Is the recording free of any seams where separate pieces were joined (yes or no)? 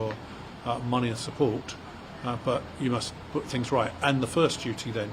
yes